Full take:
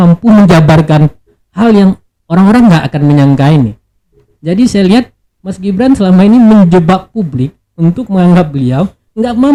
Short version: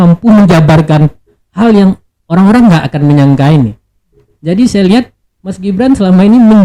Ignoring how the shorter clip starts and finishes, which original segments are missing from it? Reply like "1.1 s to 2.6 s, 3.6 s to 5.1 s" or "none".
none